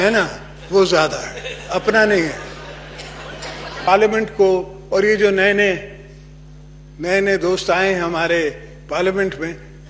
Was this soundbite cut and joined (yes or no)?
yes